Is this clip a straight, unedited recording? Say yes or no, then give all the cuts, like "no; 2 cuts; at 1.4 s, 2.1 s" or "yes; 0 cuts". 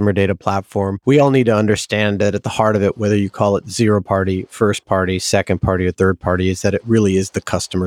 no; 1 cut; at 1.0 s